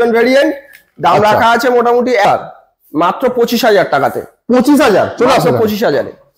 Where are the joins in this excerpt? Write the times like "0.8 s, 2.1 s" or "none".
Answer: 2.2 s